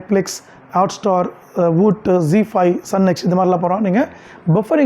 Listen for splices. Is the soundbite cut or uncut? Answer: uncut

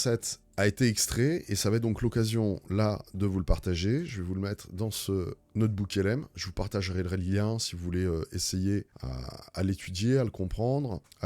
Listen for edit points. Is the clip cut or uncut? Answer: uncut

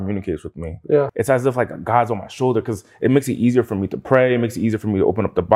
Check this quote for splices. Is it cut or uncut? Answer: cut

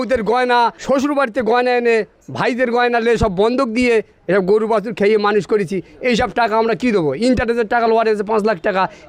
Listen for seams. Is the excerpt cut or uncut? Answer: uncut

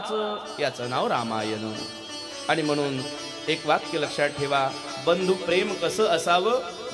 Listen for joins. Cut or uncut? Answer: uncut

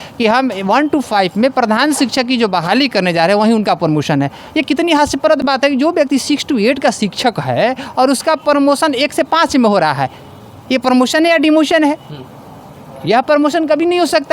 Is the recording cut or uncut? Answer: uncut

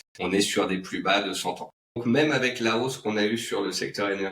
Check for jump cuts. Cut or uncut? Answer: cut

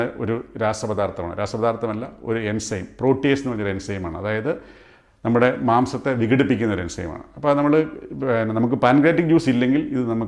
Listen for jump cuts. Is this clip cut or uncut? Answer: uncut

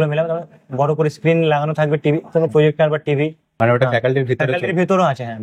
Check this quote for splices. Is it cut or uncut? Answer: uncut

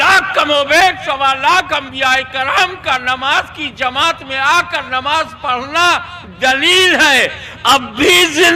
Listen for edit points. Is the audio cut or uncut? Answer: uncut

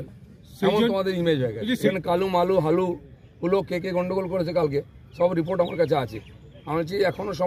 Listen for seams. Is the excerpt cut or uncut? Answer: cut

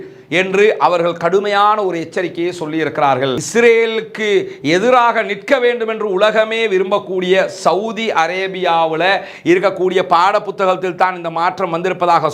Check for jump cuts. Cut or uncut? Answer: cut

